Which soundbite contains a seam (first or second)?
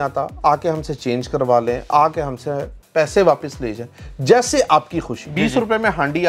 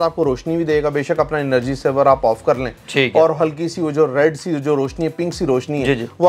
first